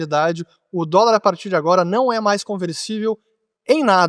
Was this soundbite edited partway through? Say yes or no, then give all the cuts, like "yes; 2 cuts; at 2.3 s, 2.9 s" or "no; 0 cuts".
no; 0 cuts